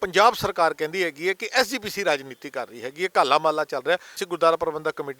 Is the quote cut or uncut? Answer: cut